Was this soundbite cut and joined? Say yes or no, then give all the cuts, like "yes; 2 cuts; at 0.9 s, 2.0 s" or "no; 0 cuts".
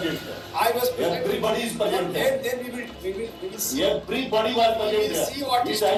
no; 0 cuts